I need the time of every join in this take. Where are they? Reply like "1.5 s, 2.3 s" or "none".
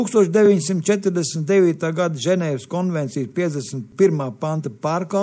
3.8 s